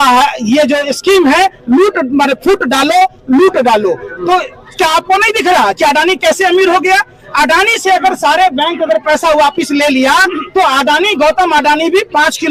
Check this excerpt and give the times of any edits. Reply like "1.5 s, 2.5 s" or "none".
none